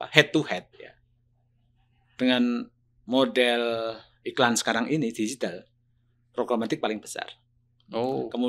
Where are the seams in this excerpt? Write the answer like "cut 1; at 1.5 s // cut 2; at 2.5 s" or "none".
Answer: none